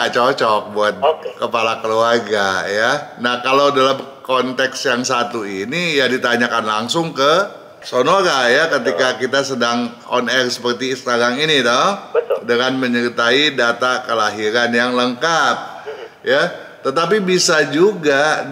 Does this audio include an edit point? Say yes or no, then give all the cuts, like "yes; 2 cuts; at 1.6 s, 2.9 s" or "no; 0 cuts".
no; 0 cuts